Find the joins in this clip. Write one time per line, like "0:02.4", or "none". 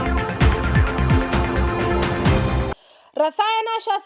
0:02.7

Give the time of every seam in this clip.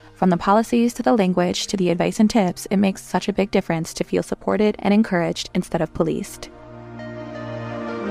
none

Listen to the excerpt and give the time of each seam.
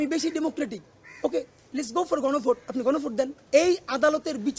0:03.4

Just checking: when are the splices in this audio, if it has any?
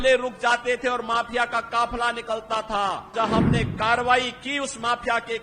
0:03.1

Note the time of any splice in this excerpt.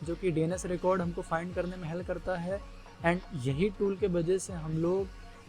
none

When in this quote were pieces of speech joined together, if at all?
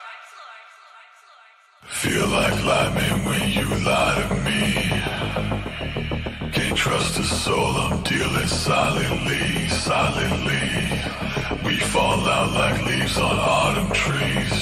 none

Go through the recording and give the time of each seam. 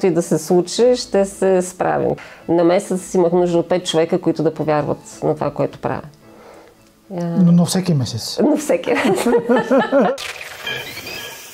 0:02.2
0:10.1

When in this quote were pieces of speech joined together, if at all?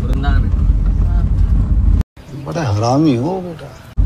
none

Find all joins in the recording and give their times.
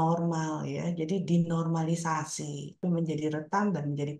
0:02.8

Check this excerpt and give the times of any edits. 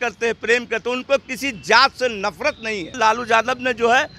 0:03.0

